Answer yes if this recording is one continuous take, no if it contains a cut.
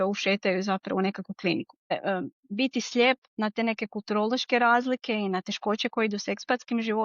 no